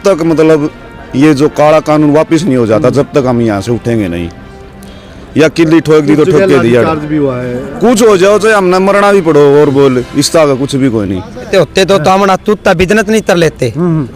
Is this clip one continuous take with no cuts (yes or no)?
no